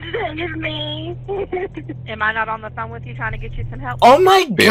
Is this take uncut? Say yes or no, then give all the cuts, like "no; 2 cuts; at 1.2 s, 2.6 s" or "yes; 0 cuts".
yes; 0 cuts